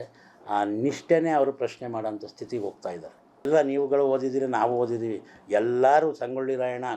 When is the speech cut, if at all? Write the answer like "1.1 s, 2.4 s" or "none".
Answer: 3.4 s